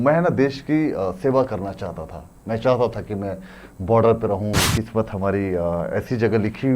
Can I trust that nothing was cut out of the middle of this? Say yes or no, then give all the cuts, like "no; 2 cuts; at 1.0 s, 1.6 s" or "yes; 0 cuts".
no; 1 cut; at 4.7 s